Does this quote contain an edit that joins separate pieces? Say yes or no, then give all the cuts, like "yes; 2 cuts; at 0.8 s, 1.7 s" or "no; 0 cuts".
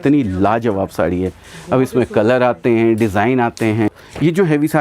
yes; 1 cut; at 3.9 s